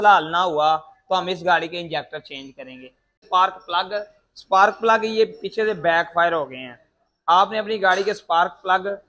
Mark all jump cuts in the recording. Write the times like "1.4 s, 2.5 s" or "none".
3.2 s